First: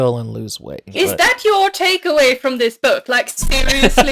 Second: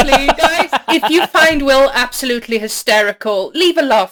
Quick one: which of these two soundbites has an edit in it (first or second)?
first